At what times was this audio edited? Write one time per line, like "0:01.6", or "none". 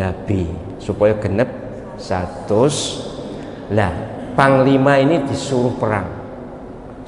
none